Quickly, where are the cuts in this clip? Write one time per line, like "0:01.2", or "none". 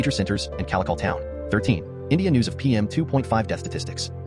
0:01.3